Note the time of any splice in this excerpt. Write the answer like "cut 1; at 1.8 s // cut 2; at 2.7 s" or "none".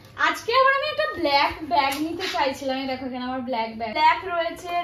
cut 1; at 3.9 s